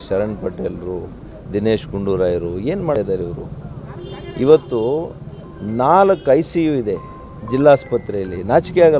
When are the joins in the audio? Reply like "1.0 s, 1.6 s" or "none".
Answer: 3.0 s